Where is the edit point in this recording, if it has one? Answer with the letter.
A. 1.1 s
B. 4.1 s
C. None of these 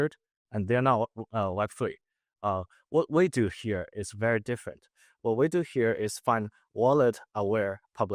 C